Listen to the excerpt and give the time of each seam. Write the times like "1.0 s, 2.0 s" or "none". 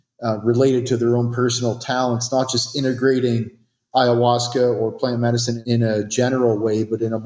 5.5 s